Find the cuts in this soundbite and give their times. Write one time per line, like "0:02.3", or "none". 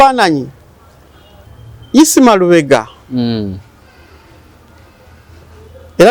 0:01.4